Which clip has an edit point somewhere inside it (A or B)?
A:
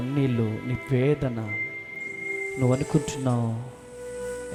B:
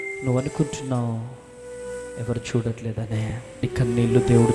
B